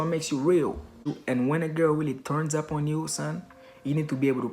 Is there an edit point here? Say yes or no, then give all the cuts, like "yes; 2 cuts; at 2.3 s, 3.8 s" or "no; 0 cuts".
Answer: yes; 1 cut; at 1.2 s